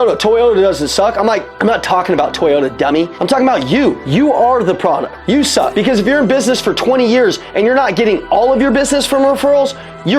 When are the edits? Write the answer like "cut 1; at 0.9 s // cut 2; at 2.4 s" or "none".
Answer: cut 1; at 1.5 s // cut 2; at 3.2 s // cut 3; at 4.0 s // cut 4; at 5.6 s